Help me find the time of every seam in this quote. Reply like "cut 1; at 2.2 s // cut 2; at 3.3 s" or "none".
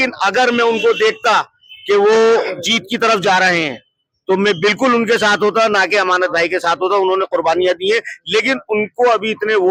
none